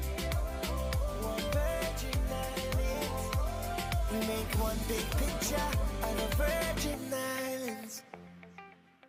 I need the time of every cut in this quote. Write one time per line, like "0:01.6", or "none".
none